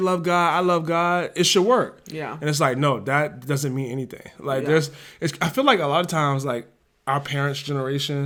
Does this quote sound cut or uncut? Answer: uncut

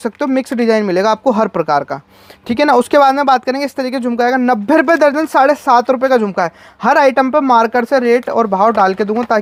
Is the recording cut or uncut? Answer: uncut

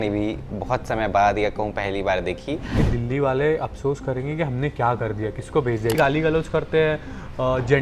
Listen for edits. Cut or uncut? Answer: cut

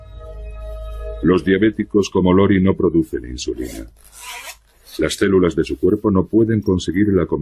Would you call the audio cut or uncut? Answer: uncut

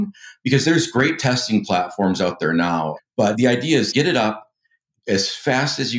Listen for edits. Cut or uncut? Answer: cut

